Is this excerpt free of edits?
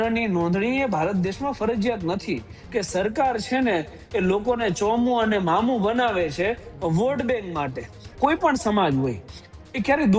no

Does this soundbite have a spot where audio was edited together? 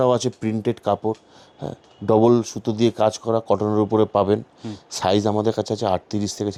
no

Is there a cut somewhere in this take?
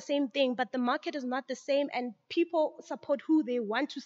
no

